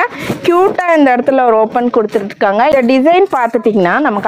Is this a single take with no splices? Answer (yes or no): no